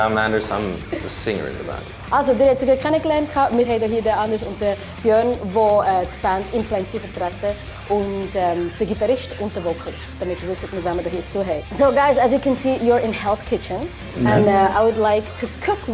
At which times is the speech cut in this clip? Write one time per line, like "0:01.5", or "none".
0:11.3

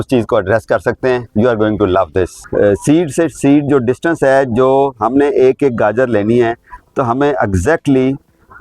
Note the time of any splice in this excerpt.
0:02.4

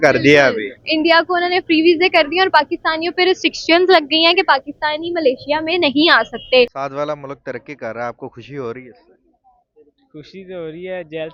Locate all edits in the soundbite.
0:06.8

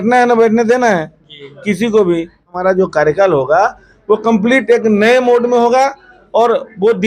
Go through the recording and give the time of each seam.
0:02.5

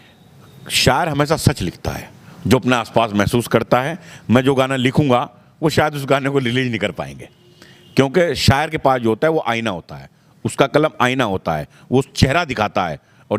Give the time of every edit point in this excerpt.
none

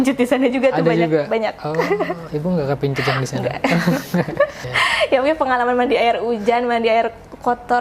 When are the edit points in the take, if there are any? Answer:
0:04.6

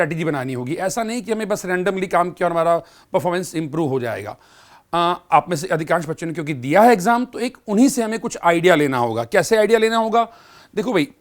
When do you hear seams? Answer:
none

